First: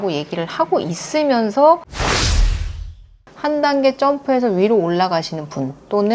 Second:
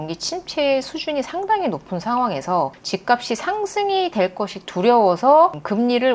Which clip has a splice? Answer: first; 2 cuts; at 1.9 s, 3.3 s

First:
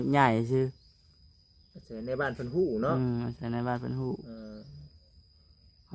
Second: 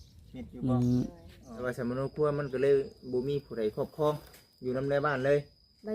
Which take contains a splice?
second; 1 cut; at 1.6 s

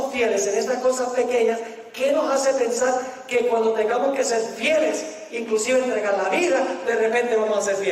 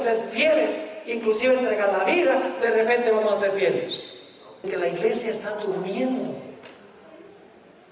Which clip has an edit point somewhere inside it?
second; 1 cut; at 4.7 s

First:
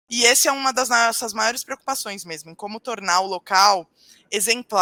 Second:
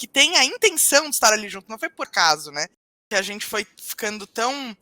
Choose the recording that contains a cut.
second; 1 cut; at 3.1 s

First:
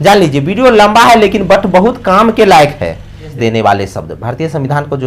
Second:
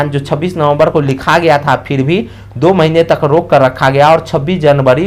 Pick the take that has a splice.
first; 1 cut; at 3.3 s

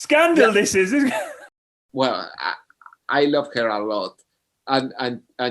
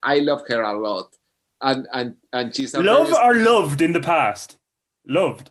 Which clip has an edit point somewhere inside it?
first; 1 cut; at 1.4 s

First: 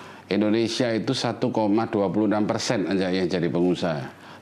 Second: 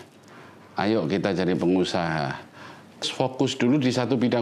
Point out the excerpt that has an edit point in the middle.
second; 1 cut; at 3.0 s

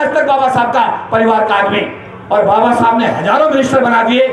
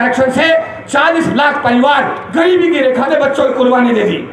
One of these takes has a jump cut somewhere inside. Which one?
second; 1 cut; at 3.1 s

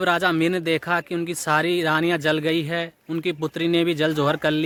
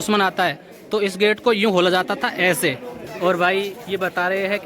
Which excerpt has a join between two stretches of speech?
second; 1 cut; at 2.9 s

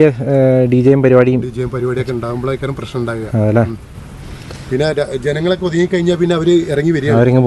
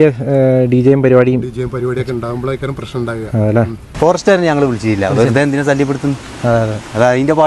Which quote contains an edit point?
second; 1 cut; at 3.8 s

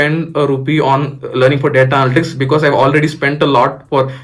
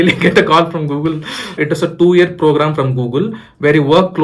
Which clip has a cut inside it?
second; 1 cut; at 1.6 s

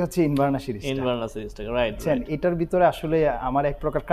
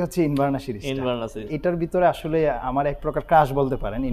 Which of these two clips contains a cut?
second; 1 cut; at 1.5 s

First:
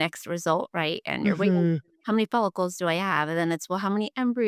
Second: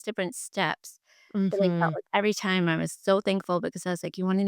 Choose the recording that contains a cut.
first; 1 cut; at 1.9 s

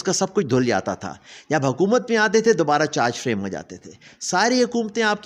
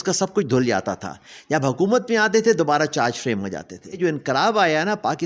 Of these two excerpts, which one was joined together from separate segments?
second; 1 cut; at 4.0 s

